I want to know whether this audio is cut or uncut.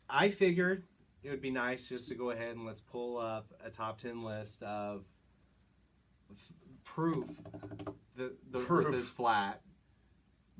cut